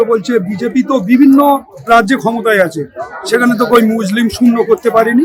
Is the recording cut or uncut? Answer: uncut